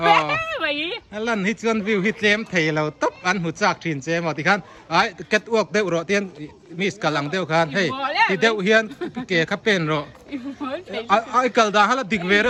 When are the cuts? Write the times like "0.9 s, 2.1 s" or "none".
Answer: none

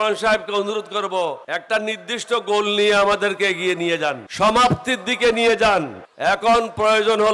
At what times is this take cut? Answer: 1.4 s, 4.2 s, 6.0 s

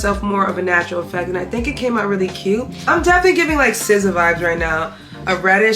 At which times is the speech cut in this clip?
2.8 s

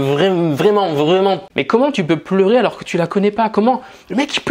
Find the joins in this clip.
1.5 s

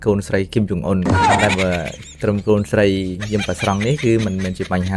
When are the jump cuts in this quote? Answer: 1.4 s

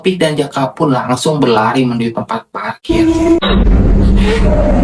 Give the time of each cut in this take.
2.9 s

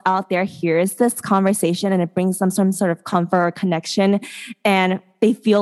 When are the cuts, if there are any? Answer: none

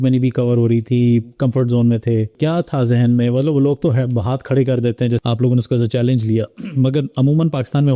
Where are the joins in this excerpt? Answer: 2.4 s, 5.2 s

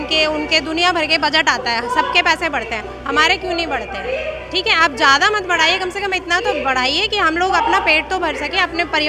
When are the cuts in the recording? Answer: none

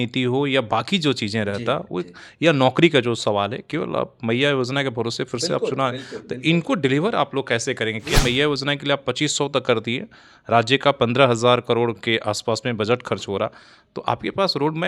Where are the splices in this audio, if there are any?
8.1 s

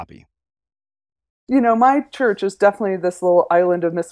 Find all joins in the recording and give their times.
1.3 s

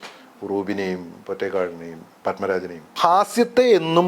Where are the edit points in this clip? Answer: 2.9 s

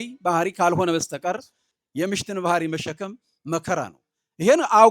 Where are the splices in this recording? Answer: 1.5 s

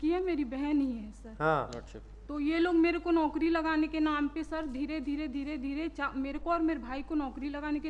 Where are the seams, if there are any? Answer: none

